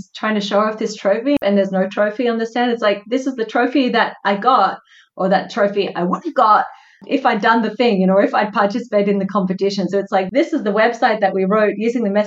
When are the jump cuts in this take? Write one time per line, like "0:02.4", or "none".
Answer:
0:01.4